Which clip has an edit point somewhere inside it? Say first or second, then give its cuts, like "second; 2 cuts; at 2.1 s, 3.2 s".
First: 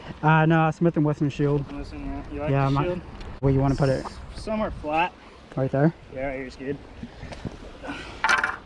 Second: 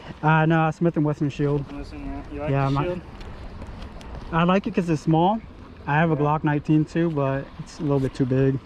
first; 1 cut; at 3.4 s